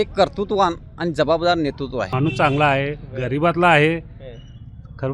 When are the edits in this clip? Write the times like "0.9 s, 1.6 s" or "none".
2.1 s